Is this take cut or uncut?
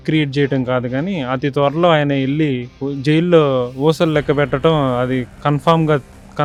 uncut